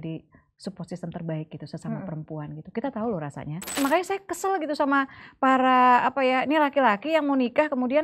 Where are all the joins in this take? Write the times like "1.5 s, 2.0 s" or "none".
3.8 s